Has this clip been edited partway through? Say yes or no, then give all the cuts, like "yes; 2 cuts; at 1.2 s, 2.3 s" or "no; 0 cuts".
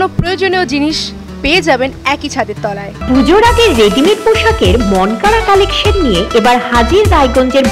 yes; 1 cut; at 3.0 s